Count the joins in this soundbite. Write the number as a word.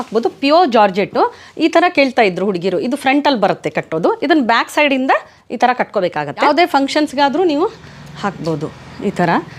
one